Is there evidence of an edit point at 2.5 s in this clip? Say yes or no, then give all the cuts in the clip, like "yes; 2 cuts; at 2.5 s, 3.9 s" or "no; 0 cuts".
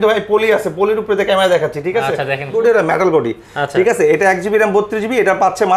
yes; 1 cut; at 2.5 s